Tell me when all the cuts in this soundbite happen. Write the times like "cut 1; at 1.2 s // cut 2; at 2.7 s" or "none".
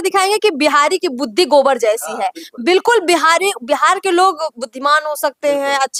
none